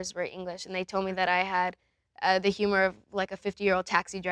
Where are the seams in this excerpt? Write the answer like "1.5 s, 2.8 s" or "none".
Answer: none

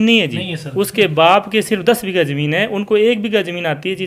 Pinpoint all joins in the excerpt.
none

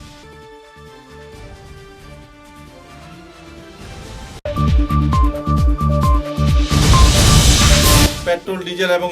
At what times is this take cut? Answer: 8.1 s

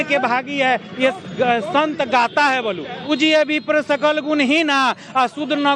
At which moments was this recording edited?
2.9 s

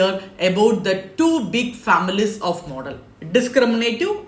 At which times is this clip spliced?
none

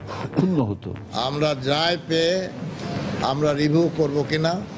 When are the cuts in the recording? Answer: 1.2 s

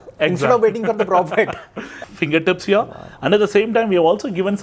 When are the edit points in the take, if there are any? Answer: 2.1 s

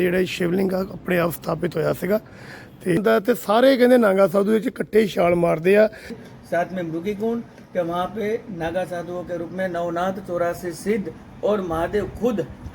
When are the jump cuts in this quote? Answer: 3.0 s, 6.2 s

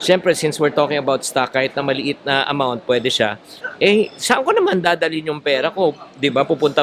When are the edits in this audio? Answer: none

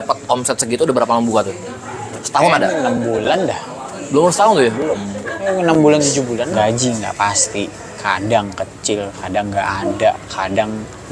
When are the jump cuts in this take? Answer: 6.5 s

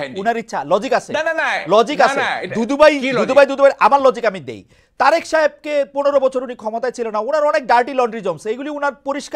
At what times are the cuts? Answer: none

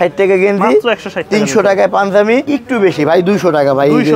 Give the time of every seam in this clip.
2.5 s

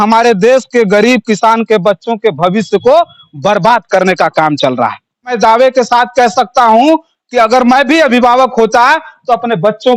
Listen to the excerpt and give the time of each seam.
5.3 s

